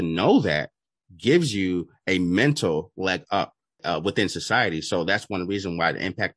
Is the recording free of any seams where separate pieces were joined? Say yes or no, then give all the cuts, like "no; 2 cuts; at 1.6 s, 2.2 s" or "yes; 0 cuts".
no; 1 cut; at 3.7 s